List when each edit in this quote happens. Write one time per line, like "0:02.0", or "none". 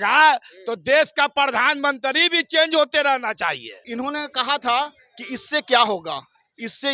0:03.7